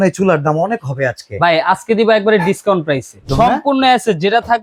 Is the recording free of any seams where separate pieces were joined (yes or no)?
no